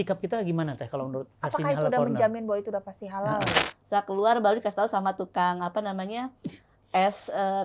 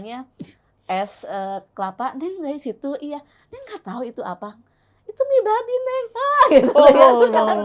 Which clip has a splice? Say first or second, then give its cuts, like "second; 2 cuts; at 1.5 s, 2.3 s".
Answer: first; 1 cut; at 3.7 s